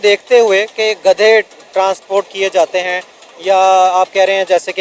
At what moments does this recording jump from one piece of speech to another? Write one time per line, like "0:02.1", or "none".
none